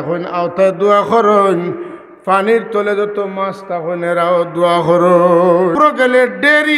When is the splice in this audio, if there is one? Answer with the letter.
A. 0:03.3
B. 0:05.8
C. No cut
B